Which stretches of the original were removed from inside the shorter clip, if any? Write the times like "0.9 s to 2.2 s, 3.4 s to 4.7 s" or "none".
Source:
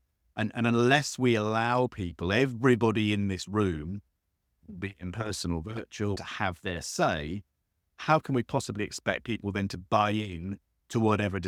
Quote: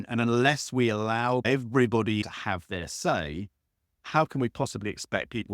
1.9 s to 2.3 s, 3.1 s to 6.2 s

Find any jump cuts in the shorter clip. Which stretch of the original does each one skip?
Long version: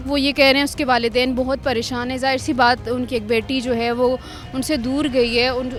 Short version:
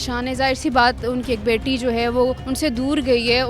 4.3 s to 4.5 s

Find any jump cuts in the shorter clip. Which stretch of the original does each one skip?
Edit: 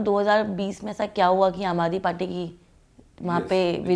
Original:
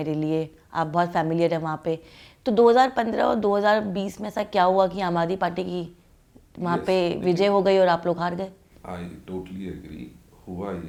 none

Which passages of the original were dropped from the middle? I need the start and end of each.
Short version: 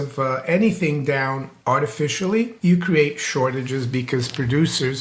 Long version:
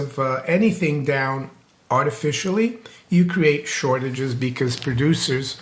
1.5 s to 1.7 s, 2.8 s to 3.0 s

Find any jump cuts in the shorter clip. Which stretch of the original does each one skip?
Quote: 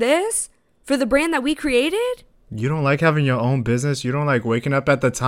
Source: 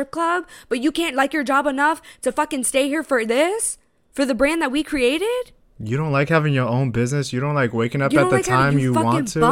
none

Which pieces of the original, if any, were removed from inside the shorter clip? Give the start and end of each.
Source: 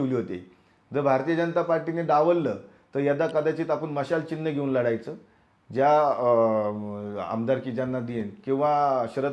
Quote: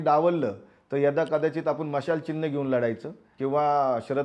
5.3 s to 8.3 s

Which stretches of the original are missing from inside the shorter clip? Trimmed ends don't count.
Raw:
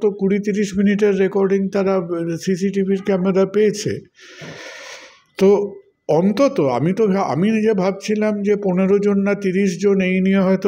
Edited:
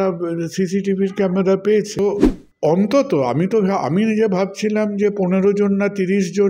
3.9 s to 5.5 s

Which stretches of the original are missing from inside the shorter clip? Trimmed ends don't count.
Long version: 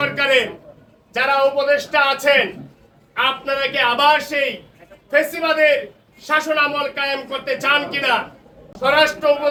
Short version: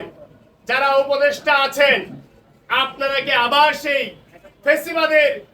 none

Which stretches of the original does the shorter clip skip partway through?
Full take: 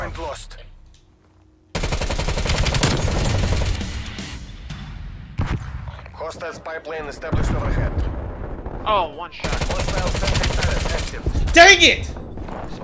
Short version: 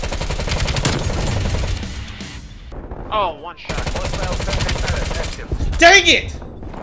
4.7 s to 8.4 s

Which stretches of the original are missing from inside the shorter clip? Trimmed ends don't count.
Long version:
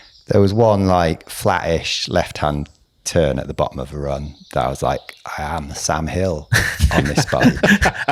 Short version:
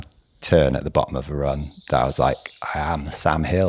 none

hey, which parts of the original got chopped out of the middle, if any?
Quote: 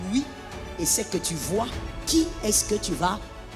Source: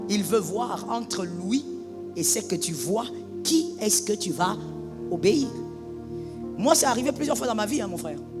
none

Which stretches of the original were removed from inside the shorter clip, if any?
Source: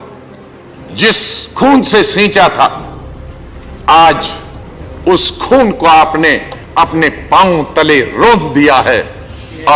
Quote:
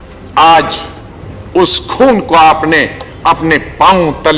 none

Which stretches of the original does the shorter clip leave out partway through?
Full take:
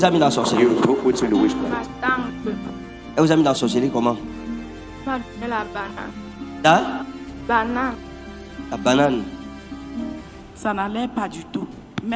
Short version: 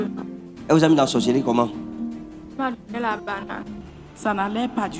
6.4 s to 10.3 s

